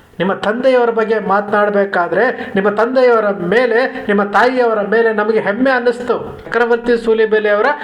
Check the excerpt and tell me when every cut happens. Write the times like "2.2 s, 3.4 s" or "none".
6.4 s